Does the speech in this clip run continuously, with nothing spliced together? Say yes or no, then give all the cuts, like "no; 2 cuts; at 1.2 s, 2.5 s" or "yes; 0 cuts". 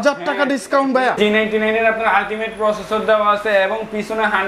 no; 1 cut; at 1.2 s